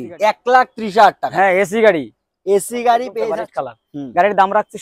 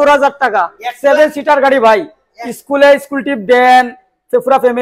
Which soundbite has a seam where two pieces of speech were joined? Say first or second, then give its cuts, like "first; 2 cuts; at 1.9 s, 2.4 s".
first; 1 cut; at 3.2 s